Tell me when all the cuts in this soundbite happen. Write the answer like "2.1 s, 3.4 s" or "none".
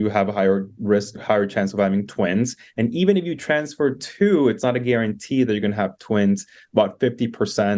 none

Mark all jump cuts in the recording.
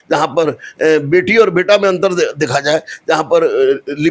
none

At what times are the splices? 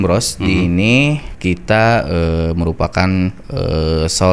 1.3 s, 3.4 s

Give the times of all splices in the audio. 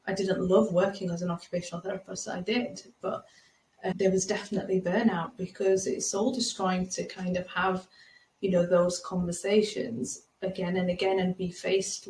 3.9 s

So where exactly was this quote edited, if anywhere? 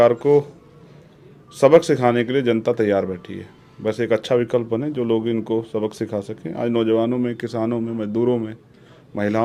none

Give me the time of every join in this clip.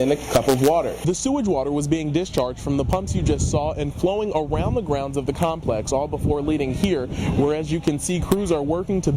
1.0 s

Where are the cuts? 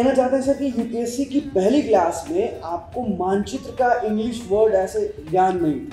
none

